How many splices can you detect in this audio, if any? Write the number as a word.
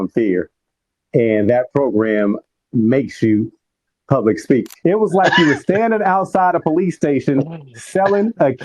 one